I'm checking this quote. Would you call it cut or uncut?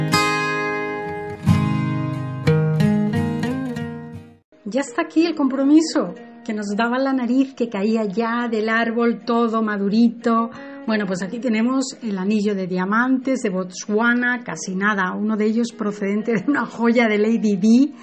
cut